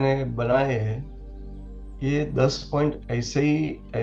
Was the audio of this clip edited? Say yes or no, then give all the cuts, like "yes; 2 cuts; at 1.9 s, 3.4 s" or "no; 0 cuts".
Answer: no; 0 cuts